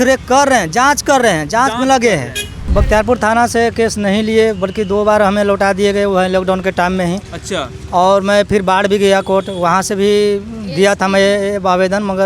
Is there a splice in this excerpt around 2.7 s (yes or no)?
yes